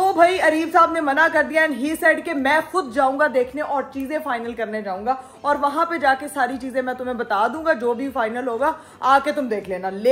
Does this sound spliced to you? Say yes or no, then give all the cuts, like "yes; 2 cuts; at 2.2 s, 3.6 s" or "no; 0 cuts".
no; 0 cuts